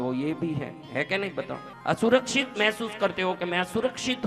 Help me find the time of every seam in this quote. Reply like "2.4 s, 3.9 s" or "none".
1.7 s